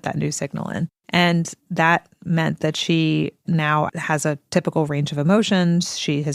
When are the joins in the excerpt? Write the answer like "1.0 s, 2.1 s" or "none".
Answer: 1.0 s, 3.9 s